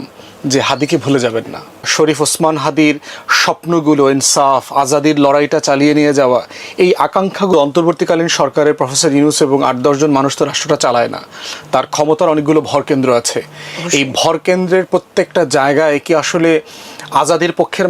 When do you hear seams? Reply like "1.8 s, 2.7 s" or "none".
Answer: 1.9 s, 7.5 s